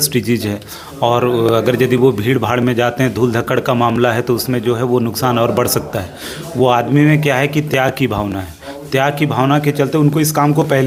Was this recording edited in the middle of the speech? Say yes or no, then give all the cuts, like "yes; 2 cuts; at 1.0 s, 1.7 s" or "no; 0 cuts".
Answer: no; 0 cuts